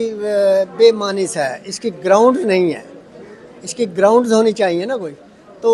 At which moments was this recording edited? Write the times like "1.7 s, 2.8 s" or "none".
none